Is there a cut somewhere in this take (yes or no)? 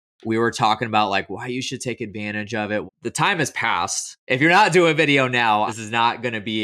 yes